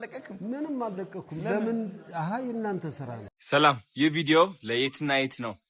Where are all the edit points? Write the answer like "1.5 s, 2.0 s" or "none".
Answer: 3.4 s